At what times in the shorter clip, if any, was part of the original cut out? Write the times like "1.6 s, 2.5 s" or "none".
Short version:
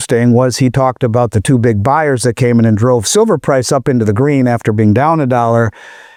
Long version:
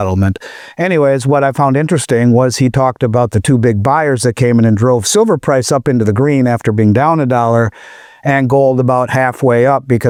none